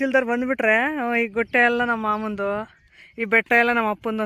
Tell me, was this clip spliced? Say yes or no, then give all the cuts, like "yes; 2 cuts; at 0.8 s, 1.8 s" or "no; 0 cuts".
no; 0 cuts